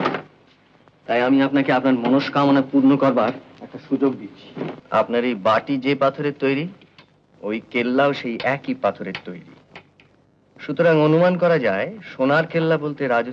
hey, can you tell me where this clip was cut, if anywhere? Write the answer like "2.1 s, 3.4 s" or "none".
4.8 s